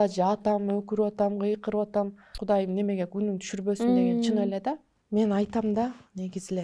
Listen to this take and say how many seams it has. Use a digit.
2